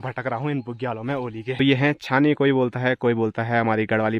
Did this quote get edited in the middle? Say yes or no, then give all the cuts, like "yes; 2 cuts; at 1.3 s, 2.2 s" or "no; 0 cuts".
yes; 1 cut; at 1.6 s